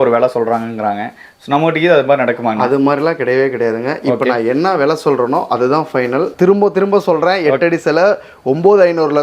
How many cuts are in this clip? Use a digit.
1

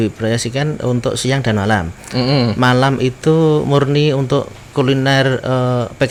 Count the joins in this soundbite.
0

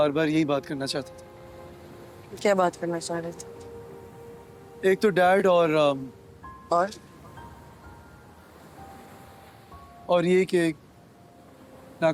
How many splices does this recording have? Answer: 0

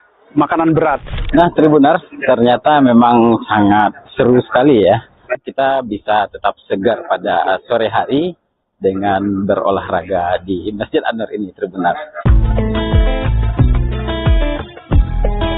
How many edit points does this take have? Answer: 2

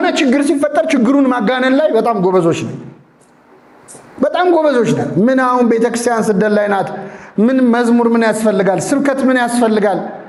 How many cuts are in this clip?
0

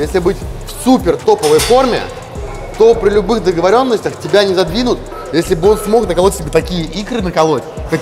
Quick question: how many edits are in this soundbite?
1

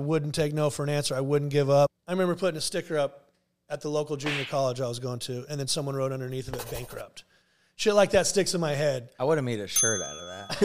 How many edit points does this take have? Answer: 1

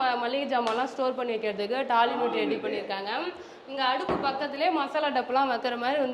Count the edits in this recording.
0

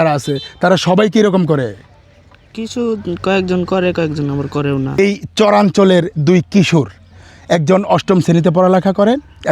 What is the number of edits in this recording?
1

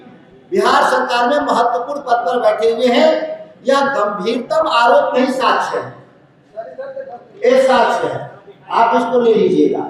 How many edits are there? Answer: 0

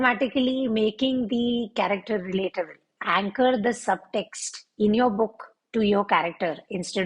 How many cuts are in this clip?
1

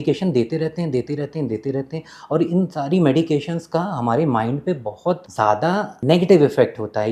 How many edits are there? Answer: 1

